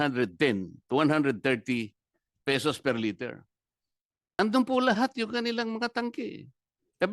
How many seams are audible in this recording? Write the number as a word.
one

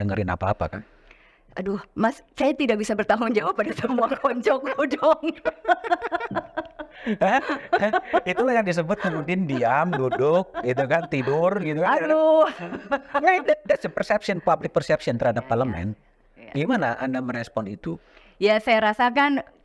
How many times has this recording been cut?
zero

